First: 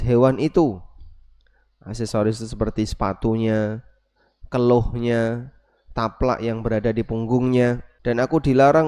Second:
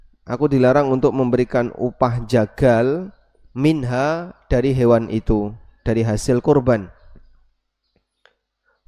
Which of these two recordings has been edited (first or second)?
first